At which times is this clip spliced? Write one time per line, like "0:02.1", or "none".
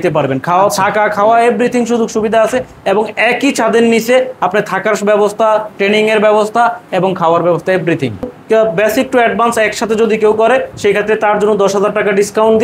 0:08.4